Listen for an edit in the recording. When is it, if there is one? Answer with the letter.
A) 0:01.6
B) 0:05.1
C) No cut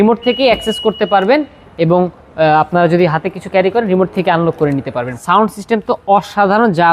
B